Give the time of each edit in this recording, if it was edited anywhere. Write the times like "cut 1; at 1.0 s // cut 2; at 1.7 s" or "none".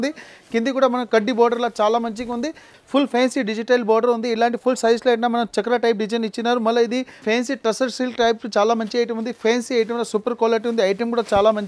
cut 1; at 2.7 s // cut 2; at 7.2 s